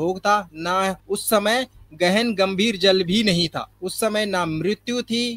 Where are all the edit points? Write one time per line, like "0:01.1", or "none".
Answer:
0:01.0
0:03.7